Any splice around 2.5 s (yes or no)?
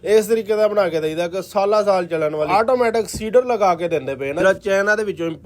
yes